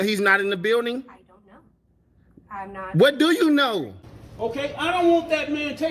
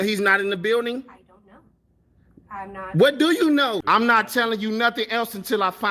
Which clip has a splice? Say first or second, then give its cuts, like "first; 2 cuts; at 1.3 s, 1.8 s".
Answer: second; 1 cut; at 3.8 s